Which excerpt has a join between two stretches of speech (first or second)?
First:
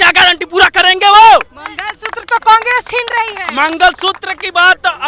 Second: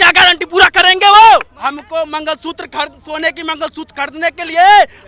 second